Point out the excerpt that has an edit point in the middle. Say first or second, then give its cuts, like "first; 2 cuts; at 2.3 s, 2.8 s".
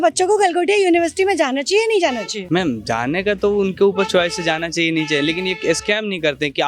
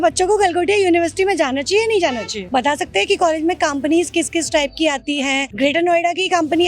second; 2 cuts; at 2.3 s, 5.5 s